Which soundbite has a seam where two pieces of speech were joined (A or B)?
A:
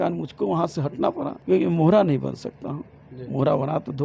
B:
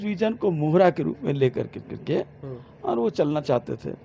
A